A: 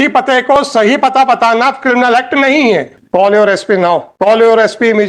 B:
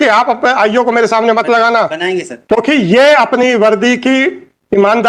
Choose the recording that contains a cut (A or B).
A